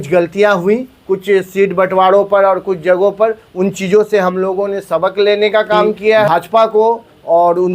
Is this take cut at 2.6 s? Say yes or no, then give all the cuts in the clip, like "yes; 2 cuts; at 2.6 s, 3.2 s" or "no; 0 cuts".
no; 1 cut; at 6.3 s